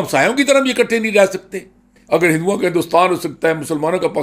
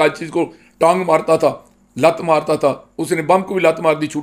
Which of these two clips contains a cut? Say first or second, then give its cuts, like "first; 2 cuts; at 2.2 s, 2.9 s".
first; 1 cut; at 2.0 s